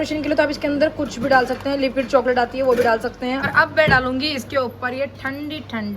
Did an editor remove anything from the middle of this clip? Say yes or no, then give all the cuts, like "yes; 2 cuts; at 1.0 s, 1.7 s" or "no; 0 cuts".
yes; 1 cut; at 3.4 s